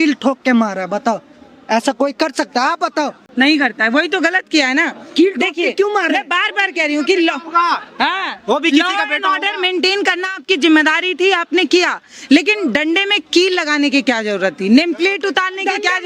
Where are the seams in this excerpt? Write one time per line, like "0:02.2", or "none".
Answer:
none